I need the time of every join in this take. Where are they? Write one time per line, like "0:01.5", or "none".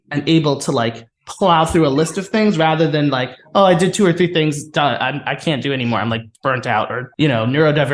0:07.0